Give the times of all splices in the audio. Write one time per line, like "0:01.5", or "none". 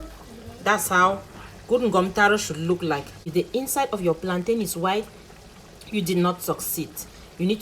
0:03.3